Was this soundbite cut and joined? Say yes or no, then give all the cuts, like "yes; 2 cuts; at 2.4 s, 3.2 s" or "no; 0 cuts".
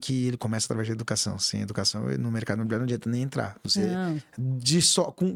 no; 0 cuts